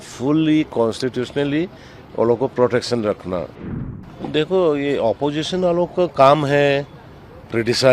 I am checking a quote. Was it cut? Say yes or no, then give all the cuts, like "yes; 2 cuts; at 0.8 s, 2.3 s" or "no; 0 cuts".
yes; 1 cut; at 3.6 s